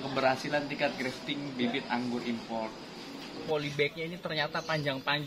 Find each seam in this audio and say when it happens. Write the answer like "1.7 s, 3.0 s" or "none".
3.4 s